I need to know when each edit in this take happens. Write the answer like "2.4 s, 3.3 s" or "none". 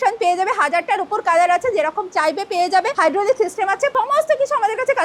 2.9 s, 3.9 s